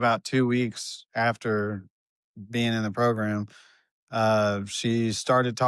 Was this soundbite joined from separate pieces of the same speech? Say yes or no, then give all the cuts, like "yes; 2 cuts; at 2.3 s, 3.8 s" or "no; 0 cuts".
no; 0 cuts